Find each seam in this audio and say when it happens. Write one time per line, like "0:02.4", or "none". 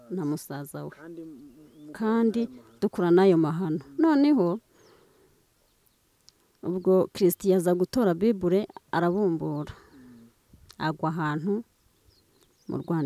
none